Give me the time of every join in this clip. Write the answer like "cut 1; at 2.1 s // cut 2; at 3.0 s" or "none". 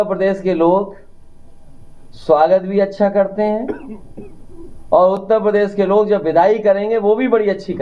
none